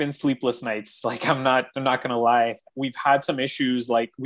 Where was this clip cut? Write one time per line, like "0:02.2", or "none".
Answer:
0:02.7